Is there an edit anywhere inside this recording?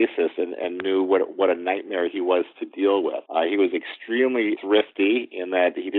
yes; 2 cuts; at 3.2 s, 4.6 s

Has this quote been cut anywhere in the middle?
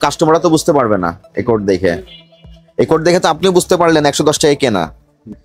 no; 0 cuts

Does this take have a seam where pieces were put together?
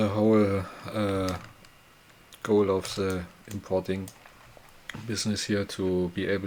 no; 0 cuts

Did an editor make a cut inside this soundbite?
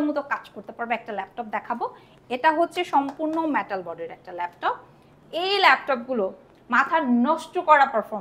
yes; 1 cut; at 5.1 s

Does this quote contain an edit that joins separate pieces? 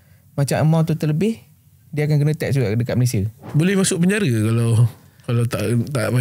yes; 1 cut; at 3.4 s

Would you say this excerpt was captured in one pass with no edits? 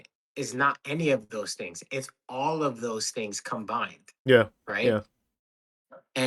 yes; 0 cuts

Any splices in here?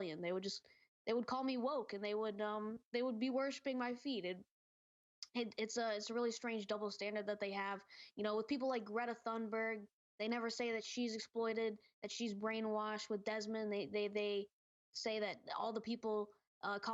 no; 0 cuts

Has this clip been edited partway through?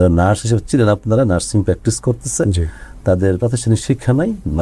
no; 0 cuts

